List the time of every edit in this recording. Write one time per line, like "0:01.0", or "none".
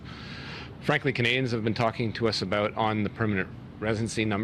none